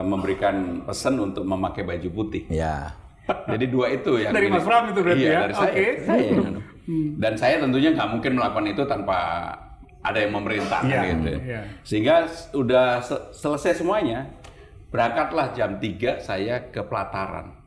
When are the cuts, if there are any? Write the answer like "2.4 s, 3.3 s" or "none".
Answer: none